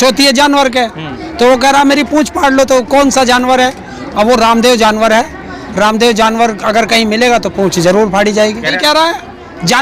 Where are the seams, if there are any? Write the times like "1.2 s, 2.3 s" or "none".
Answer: 8.8 s